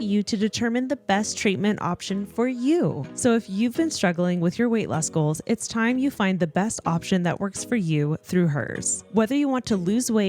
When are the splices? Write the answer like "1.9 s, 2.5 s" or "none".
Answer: 3.0 s